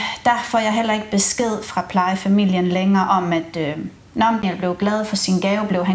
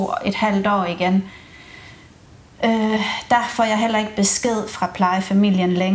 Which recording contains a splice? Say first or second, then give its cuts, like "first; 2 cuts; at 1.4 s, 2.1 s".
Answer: first; 1 cut; at 4.4 s